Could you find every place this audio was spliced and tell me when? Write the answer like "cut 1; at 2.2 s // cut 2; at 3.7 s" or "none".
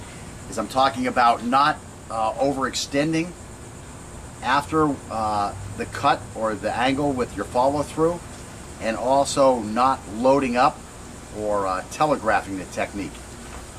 cut 1; at 9.3 s